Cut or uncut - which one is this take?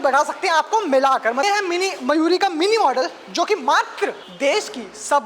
cut